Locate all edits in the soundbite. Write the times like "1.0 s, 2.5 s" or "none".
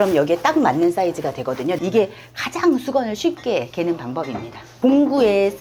1.8 s, 4.6 s